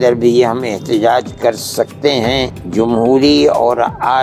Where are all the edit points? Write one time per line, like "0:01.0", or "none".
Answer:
0:02.6